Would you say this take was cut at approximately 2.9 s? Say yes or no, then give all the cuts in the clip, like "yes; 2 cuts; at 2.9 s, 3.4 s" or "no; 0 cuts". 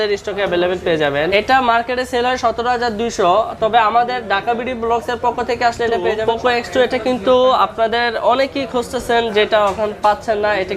no; 2 cuts; at 1.6 s, 6.2 s